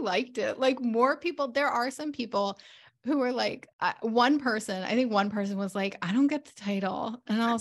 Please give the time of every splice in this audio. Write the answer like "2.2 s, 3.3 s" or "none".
3.7 s